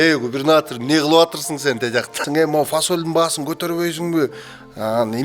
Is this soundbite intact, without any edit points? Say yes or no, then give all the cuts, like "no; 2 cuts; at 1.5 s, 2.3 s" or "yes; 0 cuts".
no; 1 cut; at 2.2 s